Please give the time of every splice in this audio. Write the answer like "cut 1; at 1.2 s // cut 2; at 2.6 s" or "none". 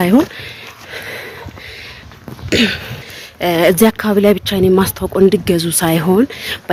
none